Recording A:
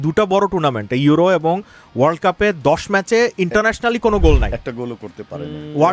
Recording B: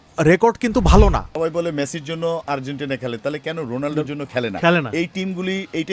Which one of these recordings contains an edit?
B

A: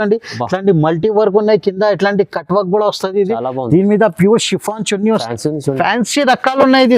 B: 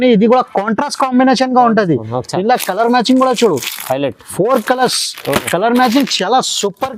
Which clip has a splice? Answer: A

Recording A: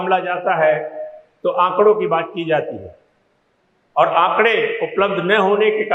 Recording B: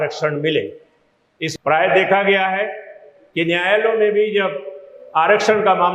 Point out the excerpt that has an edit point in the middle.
B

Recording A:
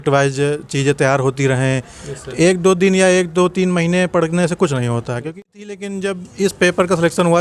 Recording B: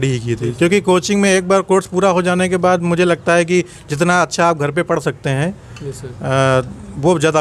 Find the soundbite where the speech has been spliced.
A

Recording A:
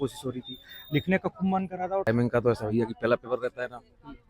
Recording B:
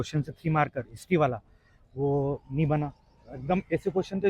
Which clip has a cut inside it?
A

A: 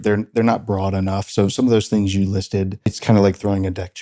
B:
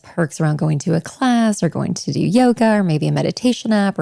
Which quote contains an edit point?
A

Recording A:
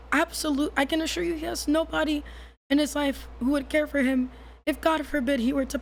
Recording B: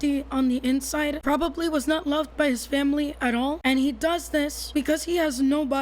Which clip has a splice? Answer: B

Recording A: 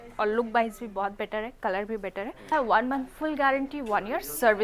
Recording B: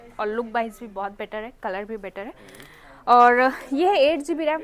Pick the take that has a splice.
A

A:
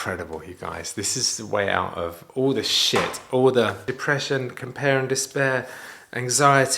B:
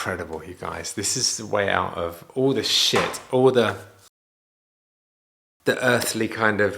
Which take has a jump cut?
A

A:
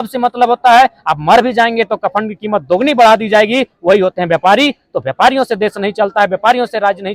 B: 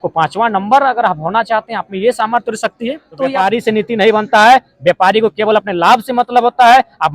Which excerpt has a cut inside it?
B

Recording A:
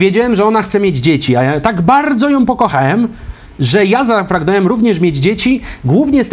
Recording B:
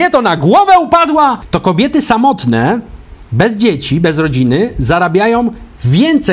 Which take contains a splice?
B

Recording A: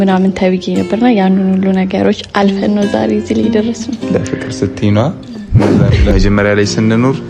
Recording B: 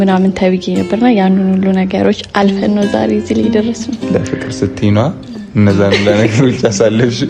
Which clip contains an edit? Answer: A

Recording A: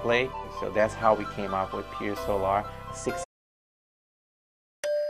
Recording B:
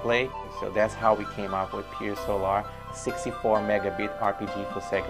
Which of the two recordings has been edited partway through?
B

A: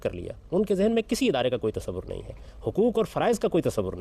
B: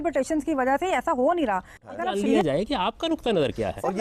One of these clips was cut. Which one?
B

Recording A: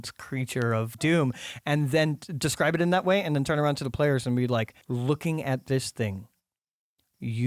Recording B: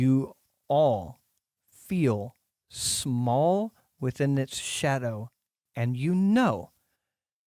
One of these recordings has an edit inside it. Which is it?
A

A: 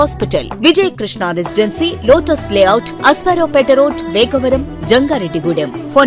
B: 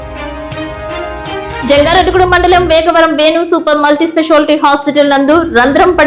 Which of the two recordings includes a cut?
B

